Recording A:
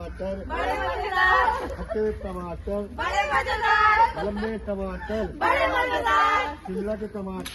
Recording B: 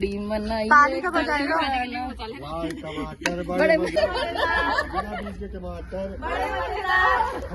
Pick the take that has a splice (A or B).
B